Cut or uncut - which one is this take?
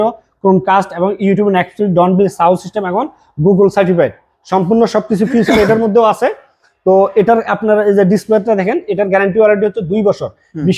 uncut